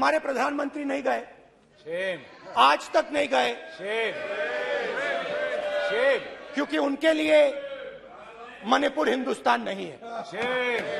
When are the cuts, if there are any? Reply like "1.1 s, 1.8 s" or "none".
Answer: none